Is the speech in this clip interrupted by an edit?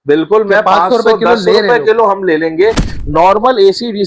yes; 1 cut; at 2.9 s

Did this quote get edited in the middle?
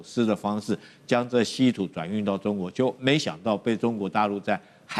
no; 0 cuts

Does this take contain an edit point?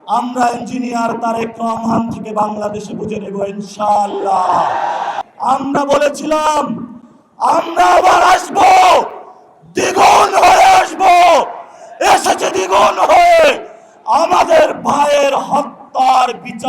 yes; 1 cut; at 5.2 s

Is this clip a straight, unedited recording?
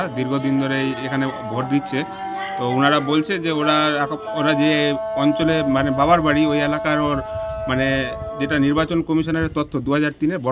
yes; 0 cuts

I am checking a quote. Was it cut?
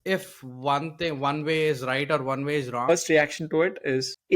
yes; 1 cut; at 2.9 s

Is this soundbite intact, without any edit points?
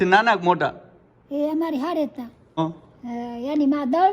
no; 1 cut; at 2.6 s

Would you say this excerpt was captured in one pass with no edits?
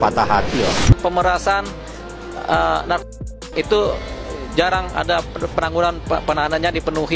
no; 1 cut; at 1.0 s

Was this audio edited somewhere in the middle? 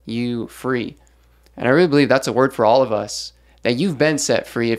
no; 0 cuts

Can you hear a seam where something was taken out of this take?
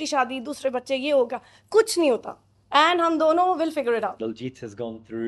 yes; 1 cut; at 4.2 s

